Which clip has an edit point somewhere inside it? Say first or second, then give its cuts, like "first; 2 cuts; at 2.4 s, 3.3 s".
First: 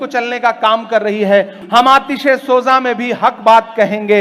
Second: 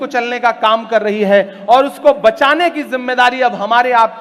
first; 1 cut; at 1.6 s